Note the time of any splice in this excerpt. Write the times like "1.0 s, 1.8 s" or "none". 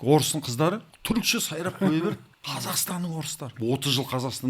0.9 s, 2.3 s, 3.5 s